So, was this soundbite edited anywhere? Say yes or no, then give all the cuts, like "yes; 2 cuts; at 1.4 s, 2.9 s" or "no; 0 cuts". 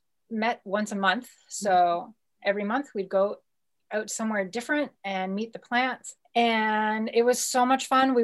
no; 0 cuts